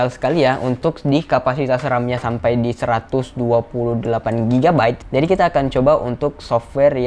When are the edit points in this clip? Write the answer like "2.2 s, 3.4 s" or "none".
5.0 s